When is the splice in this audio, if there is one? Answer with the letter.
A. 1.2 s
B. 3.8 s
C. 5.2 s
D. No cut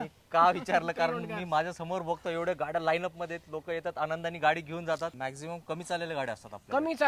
C